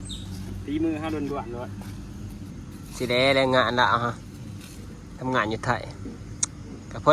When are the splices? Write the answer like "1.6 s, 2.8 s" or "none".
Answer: 2.5 s